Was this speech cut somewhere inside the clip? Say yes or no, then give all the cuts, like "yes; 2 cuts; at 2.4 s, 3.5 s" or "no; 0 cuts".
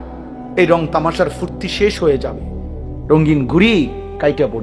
no; 0 cuts